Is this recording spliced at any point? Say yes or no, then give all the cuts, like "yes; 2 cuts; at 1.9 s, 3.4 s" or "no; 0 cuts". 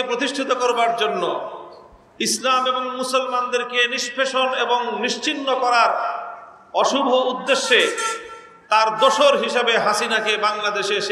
no; 0 cuts